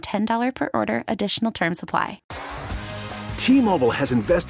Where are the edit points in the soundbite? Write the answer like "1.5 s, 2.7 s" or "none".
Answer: 2.3 s